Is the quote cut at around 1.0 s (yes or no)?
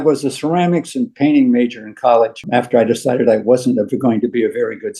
no